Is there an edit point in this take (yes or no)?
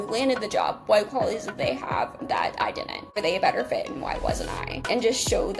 yes